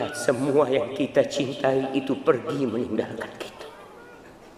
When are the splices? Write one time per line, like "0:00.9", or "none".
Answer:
none